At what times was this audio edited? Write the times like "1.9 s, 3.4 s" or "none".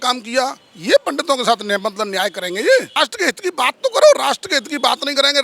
3.0 s